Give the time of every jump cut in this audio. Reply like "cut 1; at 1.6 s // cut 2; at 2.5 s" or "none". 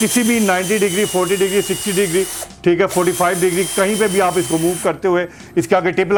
none